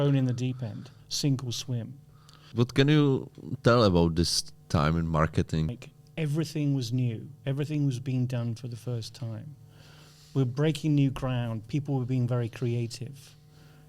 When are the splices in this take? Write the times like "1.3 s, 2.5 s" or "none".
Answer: 2.5 s, 5.7 s